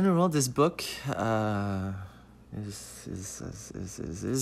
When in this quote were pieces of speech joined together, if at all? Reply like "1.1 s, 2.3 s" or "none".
none